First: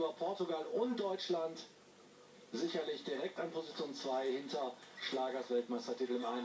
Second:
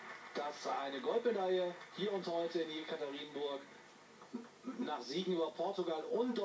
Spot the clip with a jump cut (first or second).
second